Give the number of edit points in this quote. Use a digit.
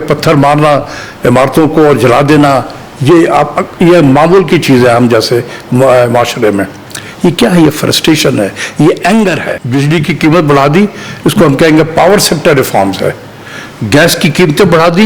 1